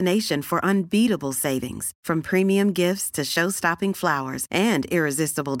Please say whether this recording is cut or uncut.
uncut